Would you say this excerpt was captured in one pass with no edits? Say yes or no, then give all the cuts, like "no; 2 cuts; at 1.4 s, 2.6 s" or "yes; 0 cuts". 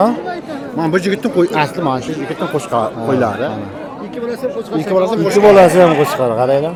yes; 0 cuts